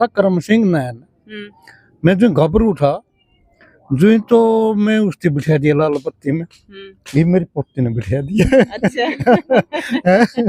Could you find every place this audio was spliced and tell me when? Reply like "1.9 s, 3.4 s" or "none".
none